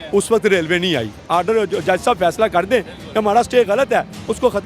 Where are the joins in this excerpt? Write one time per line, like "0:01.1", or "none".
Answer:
0:01.1